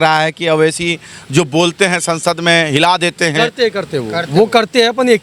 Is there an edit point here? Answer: no; 0 cuts

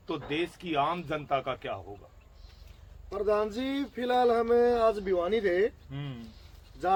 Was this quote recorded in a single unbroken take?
yes; 0 cuts

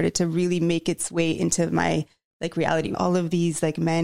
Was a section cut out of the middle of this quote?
yes; 1 cut; at 3.0 s

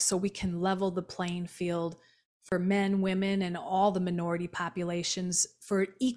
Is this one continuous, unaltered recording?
yes; 0 cuts

